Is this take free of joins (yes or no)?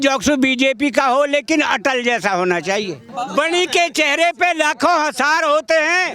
no